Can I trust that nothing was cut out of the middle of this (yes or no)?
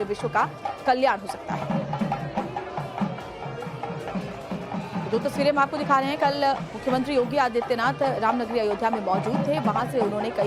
yes